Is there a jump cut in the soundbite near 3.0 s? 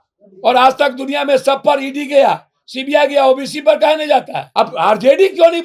no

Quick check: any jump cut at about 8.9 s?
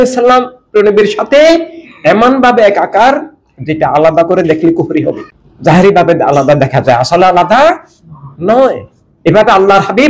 no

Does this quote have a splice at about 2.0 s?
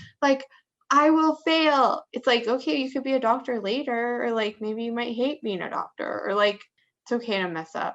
yes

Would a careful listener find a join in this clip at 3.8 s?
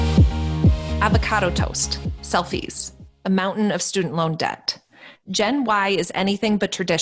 no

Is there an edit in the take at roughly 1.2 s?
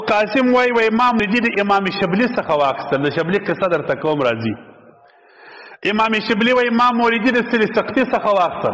yes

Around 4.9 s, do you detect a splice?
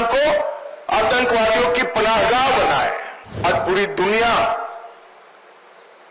no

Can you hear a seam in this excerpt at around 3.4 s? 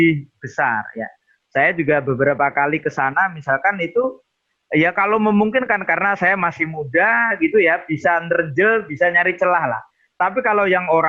no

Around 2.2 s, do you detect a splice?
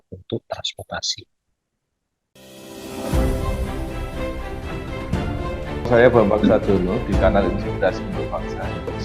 yes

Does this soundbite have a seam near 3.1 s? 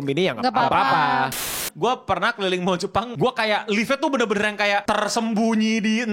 yes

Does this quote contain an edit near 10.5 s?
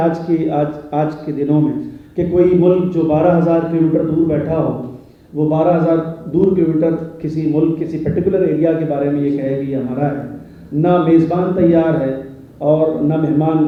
no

